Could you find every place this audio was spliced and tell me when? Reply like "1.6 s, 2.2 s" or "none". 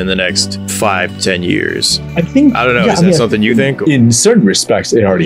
none